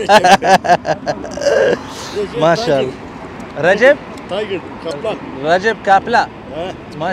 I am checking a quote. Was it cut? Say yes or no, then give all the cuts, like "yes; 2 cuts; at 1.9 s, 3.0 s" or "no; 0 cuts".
no; 0 cuts